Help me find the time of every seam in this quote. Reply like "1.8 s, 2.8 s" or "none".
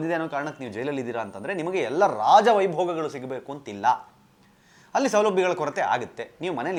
none